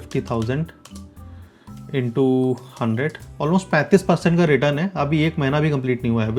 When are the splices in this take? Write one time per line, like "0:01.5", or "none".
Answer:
none